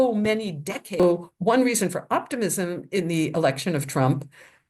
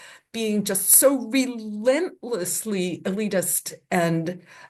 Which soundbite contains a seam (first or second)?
first